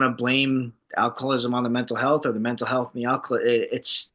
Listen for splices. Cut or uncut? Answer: uncut